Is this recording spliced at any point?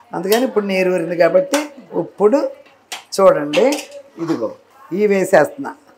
no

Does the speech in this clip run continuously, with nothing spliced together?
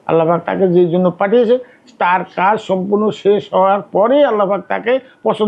yes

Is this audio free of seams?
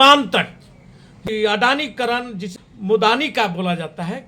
no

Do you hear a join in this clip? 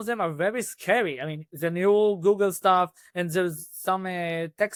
no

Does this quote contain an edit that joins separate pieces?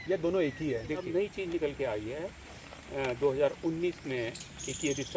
yes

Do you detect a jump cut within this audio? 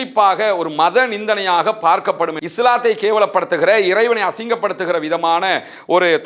yes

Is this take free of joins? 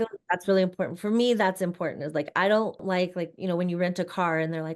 no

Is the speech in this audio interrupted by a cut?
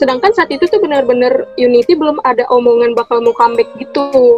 no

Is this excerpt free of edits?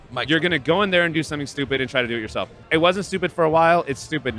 no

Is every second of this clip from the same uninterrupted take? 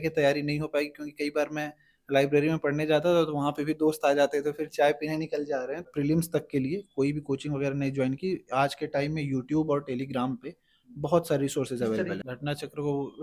no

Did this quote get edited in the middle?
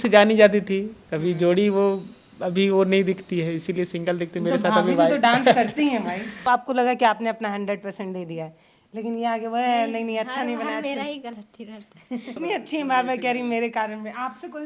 yes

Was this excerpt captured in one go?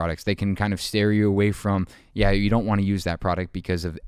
yes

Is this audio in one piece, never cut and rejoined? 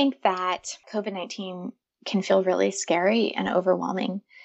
yes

